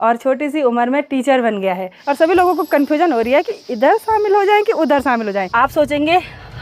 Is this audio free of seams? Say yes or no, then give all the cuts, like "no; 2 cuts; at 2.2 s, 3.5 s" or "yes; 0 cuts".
no; 2 cuts; at 1.9 s, 5.5 s